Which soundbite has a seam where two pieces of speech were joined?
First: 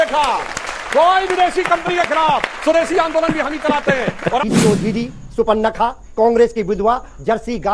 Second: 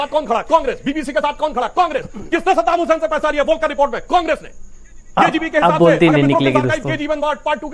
first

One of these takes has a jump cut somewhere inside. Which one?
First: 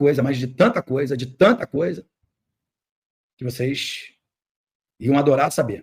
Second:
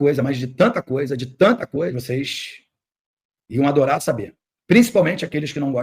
second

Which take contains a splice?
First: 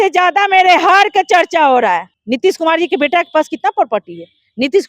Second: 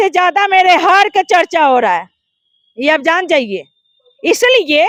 first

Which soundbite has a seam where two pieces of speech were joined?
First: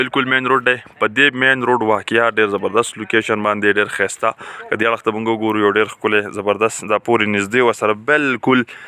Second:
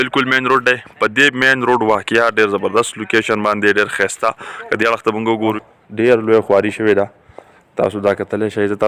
second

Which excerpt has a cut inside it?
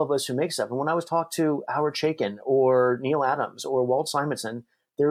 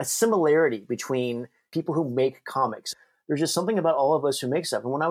second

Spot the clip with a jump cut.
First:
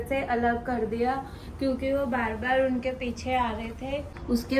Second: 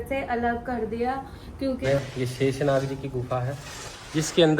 second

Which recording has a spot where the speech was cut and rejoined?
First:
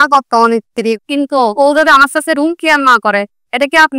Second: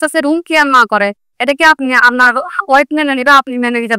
first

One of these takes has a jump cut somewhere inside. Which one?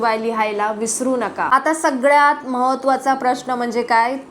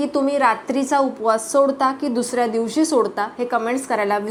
first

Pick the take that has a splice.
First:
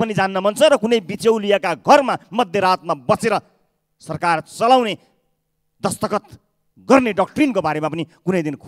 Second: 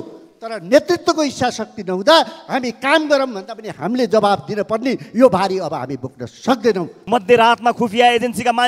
second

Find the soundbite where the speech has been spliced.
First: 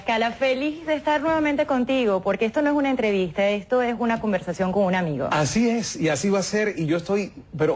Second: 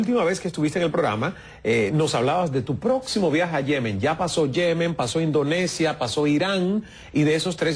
first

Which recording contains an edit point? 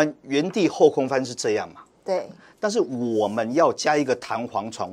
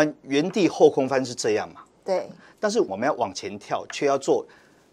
second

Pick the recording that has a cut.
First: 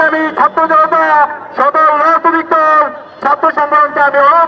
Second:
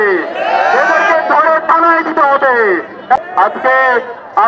second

